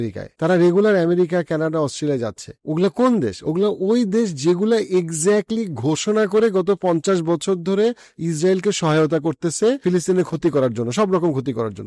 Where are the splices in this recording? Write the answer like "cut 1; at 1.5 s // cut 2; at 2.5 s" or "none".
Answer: none